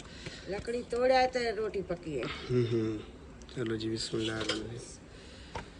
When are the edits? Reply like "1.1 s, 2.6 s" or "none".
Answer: 4.5 s